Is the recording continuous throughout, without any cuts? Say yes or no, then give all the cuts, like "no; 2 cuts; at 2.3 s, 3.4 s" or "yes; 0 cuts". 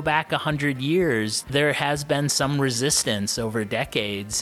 no; 1 cut; at 1.4 s